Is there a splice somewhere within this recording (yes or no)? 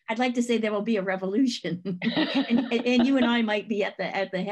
no